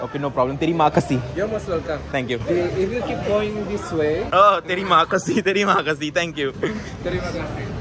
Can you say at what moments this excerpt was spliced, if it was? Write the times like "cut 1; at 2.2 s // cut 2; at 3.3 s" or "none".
cut 1; at 4.3 s